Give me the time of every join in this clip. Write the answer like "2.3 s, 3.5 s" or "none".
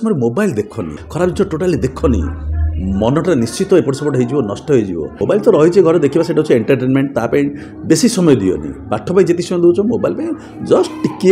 1.0 s, 5.1 s

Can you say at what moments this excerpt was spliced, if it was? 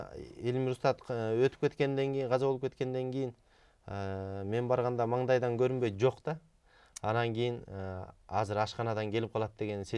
none

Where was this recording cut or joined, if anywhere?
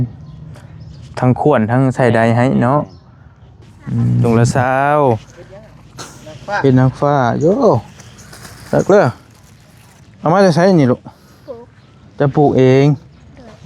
4.2 s

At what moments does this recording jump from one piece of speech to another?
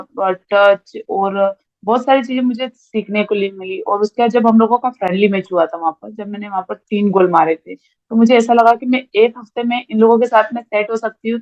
none

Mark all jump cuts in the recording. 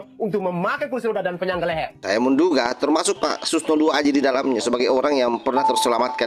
1.9 s

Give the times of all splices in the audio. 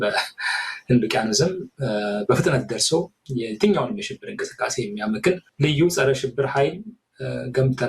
5.5 s

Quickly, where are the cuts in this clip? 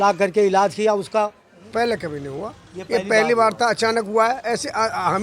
1.6 s

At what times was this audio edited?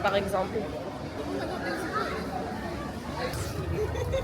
3.3 s

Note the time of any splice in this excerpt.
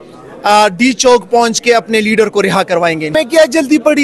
3.1 s

